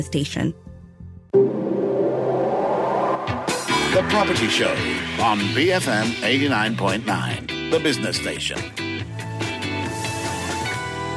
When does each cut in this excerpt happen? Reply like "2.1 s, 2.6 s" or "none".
0.9 s

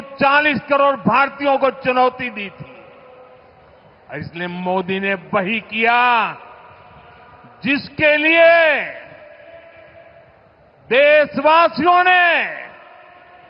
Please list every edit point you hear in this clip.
none

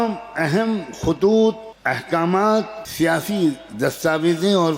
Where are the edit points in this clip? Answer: 1.7 s, 2.8 s

